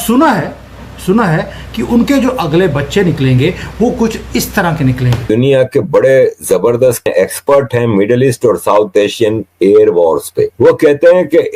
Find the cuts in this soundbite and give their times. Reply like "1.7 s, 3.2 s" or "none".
5.2 s, 7.1 s, 10.5 s

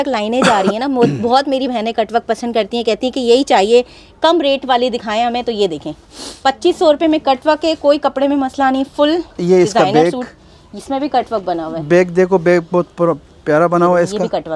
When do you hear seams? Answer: none

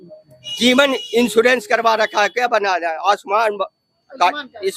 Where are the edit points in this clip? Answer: none

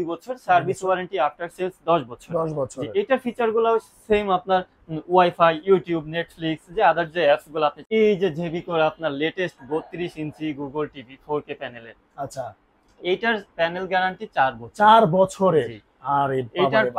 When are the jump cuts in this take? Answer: 7.8 s

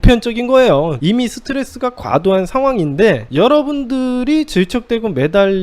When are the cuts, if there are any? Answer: 1.0 s

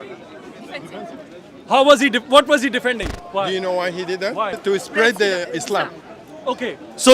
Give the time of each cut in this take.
3.1 s, 4.6 s

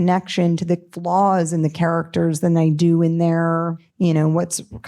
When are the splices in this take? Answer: 3.8 s

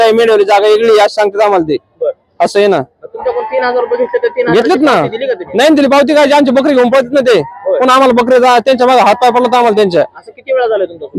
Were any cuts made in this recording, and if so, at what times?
none

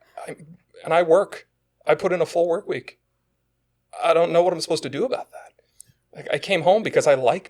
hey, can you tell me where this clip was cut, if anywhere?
none

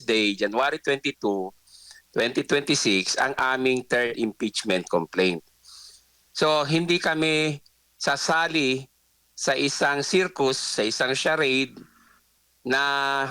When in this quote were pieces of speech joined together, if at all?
none

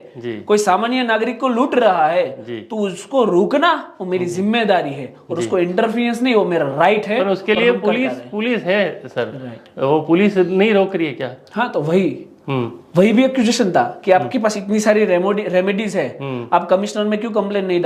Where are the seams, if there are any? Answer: none

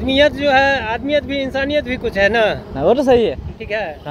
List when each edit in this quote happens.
none

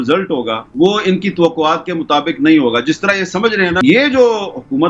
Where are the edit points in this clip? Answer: 3.8 s

